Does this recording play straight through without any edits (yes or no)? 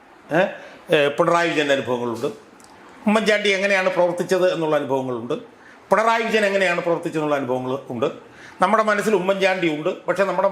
yes